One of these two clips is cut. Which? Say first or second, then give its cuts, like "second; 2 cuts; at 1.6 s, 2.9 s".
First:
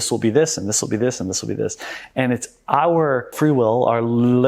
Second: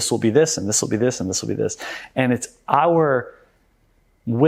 first; 1 cut; at 3.3 s